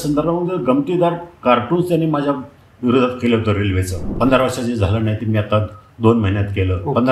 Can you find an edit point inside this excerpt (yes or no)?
yes